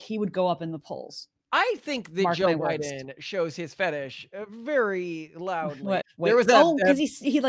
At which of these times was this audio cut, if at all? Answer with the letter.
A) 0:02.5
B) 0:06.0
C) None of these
B